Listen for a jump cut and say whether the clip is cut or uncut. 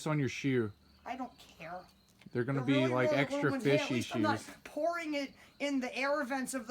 uncut